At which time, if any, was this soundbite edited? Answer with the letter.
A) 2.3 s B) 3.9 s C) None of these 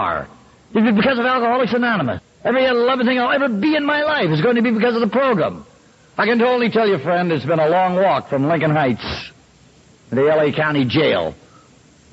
A